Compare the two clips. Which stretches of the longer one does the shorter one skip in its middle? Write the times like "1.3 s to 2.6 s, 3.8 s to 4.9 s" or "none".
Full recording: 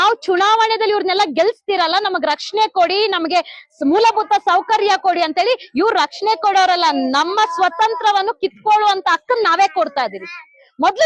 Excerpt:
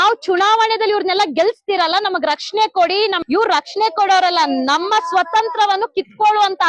3.2 s to 5.7 s